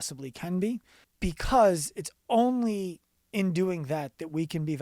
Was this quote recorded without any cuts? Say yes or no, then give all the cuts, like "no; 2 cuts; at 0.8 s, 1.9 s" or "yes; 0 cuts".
no; 1 cut; at 1.0 s